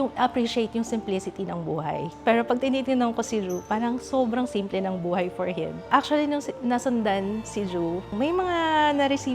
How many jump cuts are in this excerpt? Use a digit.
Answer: 3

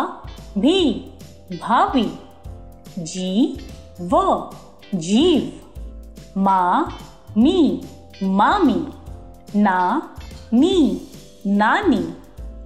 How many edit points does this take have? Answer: 0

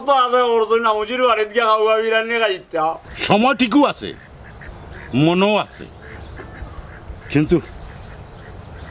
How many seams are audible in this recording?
1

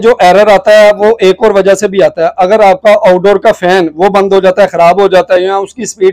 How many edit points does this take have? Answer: 0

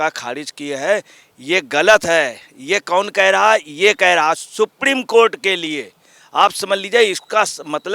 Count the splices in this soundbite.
0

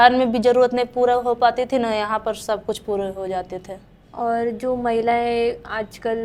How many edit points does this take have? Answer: 0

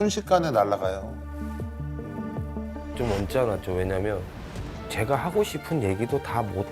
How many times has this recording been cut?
1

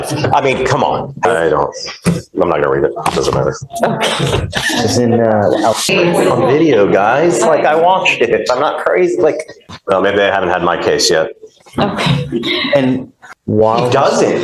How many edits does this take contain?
4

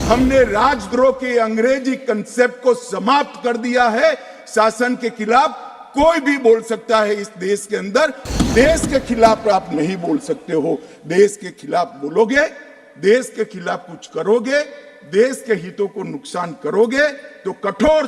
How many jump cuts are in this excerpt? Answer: 1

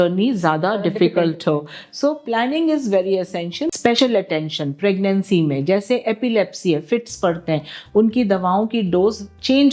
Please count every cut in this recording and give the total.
1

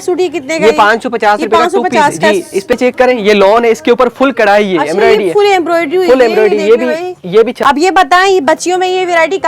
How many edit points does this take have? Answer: 2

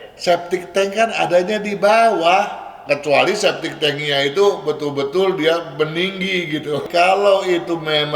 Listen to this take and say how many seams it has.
2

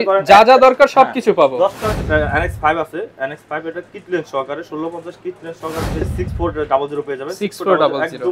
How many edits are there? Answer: 2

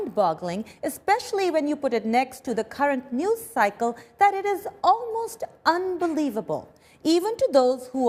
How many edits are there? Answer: 0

